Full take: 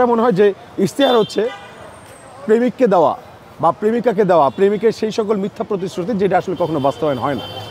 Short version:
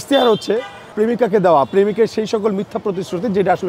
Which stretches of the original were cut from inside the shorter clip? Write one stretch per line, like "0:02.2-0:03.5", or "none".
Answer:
0:01.8-0:03.8